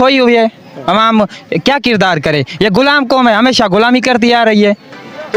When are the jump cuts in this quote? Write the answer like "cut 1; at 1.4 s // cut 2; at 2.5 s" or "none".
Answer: none